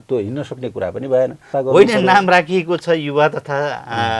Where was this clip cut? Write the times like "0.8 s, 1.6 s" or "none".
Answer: 1.4 s